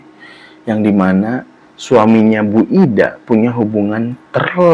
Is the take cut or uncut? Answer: uncut